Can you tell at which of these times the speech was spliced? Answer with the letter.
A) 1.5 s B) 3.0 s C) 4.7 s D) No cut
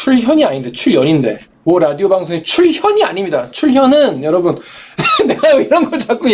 A